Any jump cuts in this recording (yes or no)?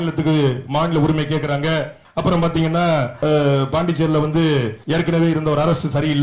yes